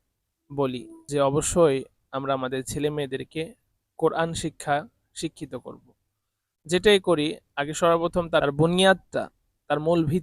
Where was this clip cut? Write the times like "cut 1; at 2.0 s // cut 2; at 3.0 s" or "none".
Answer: cut 1; at 0.9 s